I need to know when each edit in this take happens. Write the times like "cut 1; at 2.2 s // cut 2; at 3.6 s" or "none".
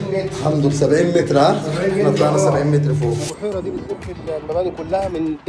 cut 1; at 3.3 s